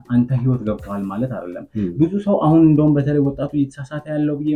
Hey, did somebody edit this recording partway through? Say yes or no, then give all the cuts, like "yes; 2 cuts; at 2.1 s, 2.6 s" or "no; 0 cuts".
no; 0 cuts